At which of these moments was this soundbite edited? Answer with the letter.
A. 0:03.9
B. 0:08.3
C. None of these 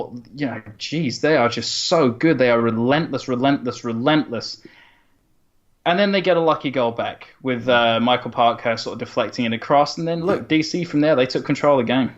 B